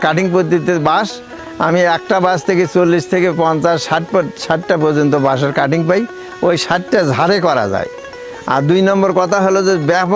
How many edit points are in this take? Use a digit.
0